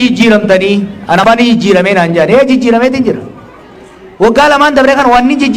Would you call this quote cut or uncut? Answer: cut